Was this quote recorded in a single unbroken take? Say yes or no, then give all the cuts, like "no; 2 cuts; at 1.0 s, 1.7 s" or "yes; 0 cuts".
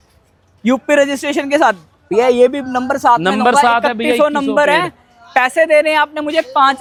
yes; 0 cuts